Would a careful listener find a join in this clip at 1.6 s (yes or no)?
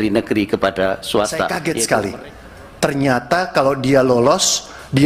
yes